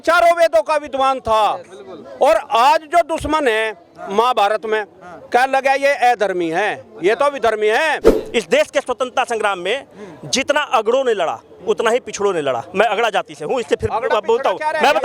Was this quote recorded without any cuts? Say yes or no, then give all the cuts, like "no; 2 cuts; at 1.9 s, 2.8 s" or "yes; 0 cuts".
no; 1 cut; at 8.1 s